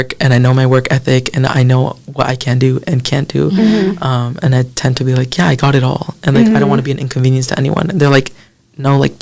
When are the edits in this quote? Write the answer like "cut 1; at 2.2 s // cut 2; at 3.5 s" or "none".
none